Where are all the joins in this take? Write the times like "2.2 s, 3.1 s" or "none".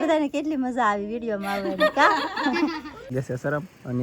3.1 s